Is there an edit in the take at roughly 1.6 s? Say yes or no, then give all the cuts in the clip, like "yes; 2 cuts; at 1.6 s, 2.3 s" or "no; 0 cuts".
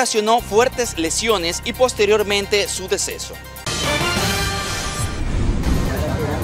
no; 2 cuts; at 3.6 s, 5.5 s